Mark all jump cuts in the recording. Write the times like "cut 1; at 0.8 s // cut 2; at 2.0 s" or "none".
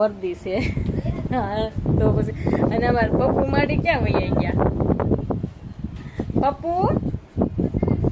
none